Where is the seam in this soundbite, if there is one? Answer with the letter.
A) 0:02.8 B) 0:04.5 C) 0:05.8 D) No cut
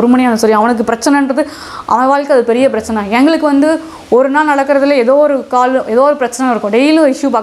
D